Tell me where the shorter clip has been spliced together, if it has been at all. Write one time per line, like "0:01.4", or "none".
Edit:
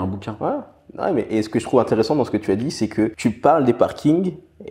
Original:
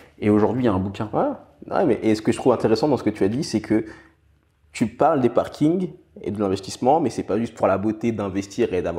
0:03.1